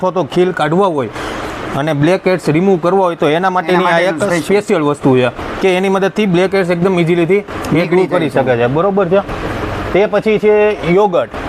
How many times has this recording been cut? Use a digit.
0